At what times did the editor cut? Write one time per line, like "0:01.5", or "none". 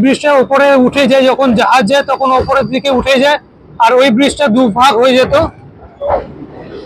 0:05.9

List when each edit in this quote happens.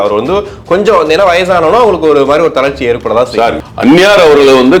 0:03.6

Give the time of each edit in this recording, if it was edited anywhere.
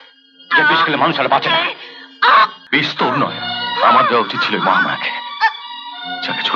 0:02.6

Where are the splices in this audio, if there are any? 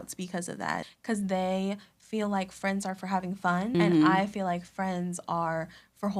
0:00.9
0:03.7

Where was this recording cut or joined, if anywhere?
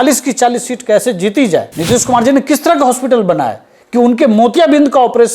0:01.7

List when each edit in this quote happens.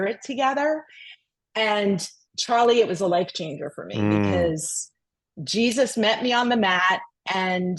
none

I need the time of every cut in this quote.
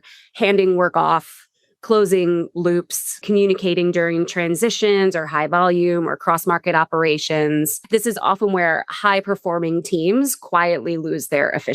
0:03.2
0:07.8

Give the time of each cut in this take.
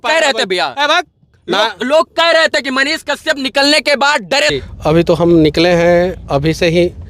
0:04.5

